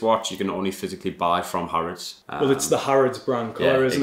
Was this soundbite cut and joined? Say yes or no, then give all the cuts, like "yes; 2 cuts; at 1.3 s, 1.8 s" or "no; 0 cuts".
no; 0 cuts